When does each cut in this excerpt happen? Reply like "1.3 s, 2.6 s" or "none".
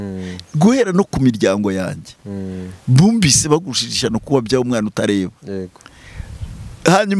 none